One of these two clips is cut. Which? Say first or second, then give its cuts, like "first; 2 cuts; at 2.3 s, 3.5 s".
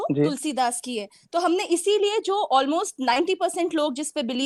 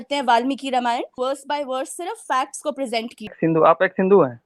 second; 2 cuts; at 1.2 s, 3.3 s